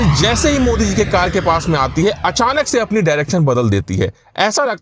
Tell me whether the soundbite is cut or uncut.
uncut